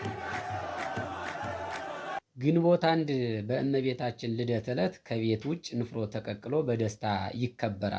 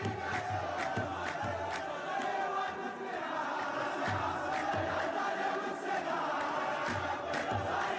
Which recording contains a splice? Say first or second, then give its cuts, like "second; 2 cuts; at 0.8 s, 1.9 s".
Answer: first; 1 cut; at 2.2 s